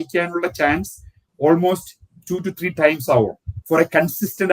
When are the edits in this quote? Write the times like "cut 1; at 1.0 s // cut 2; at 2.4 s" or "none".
cut 1; at 3.5 s